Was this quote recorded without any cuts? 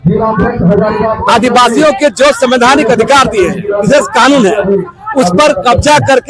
yes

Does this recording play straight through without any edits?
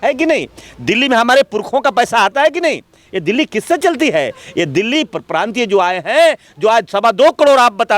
yes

